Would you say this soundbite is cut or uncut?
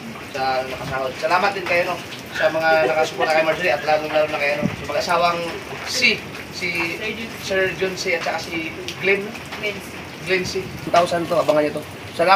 cut